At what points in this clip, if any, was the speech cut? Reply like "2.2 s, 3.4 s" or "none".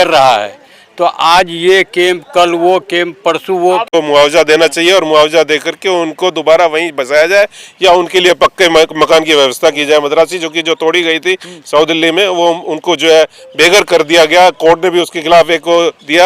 3.9 s